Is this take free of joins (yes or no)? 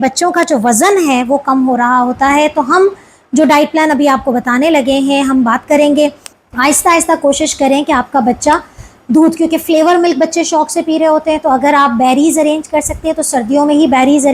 no